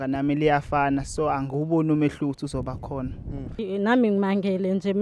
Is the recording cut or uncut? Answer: cut